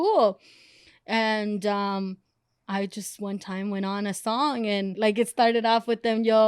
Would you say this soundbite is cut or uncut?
cut